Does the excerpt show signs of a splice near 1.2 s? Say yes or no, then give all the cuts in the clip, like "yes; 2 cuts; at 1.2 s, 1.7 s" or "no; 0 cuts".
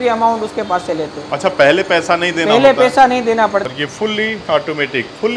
no; 1 cut; at 3.6 s